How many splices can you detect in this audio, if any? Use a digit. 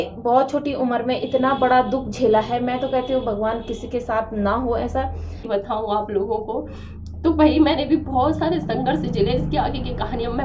1